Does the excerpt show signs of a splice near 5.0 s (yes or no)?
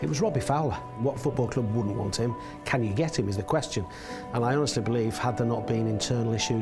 no